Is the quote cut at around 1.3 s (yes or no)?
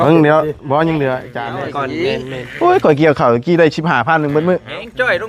yes